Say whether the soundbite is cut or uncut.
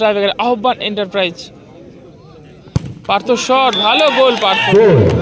uncut